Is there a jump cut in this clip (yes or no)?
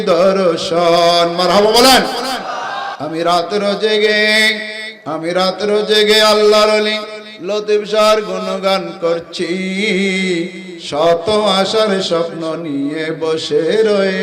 yes